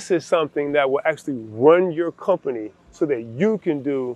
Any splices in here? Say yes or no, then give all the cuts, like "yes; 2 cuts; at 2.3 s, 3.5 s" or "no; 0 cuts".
no; 0 cuts